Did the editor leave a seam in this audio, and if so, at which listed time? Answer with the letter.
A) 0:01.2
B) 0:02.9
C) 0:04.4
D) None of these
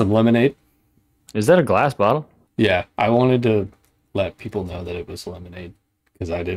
A